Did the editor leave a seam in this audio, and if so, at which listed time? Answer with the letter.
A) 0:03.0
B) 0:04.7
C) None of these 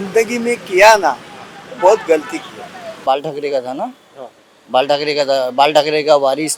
A